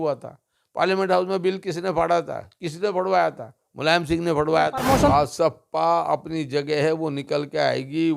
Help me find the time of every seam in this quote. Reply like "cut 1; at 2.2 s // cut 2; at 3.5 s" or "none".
cut 1; at 5.1 s